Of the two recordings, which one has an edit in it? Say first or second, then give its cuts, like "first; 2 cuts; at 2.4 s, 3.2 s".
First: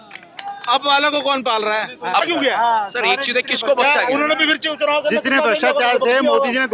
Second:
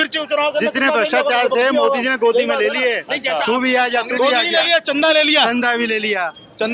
first; 1 cut; at 2.2 s